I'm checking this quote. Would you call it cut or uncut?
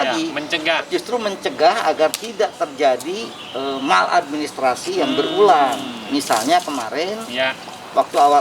uncut